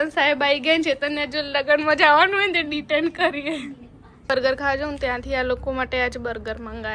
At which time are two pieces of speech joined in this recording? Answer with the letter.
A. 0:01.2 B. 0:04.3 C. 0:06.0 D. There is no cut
B